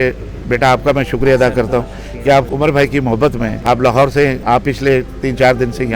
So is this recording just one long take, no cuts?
no; 3 cuts; at 2.5 s, 3.6 s, 4.4 s

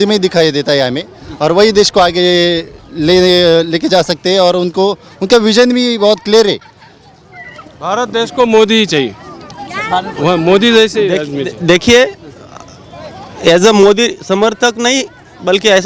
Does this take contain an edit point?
no; 0 cuts

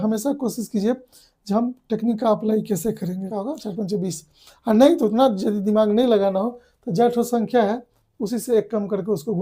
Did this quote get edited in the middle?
yes; 1 cut; at 3.3 s

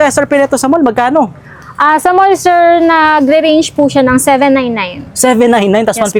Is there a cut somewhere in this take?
no; 0 cuts

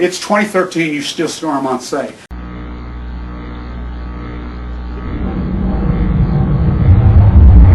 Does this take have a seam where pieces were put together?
yes; 1 cut; at 2.3 s

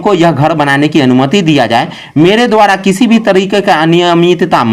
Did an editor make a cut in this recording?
no; 0 cuts

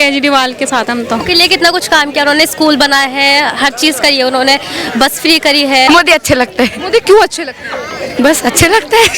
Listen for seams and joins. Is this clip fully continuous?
no; 2 cuts; at 1.2 s, 5.9 s

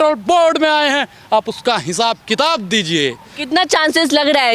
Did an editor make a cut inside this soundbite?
yes; 1 cut; at 3.3 s

